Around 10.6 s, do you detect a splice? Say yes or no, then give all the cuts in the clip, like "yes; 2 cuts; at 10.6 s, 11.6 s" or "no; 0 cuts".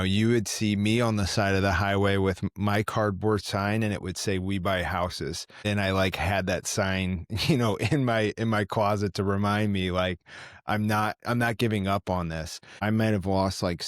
no; 2 cuts; at 5.6 s, 12.8 s